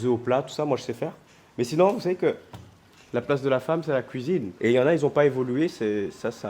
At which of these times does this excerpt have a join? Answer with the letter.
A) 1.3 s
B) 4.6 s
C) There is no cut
B